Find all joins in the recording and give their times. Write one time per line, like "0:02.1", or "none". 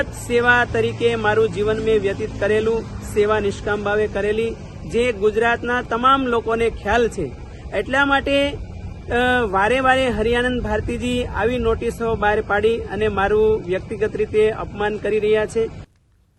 none